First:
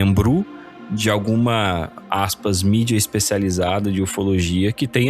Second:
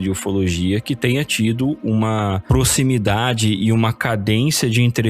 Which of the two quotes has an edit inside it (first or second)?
second